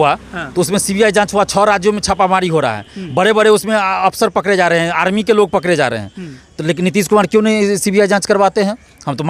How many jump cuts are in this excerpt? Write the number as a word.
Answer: zero